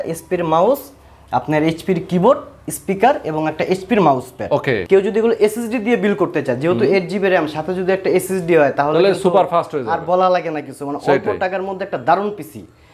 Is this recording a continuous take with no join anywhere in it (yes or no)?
no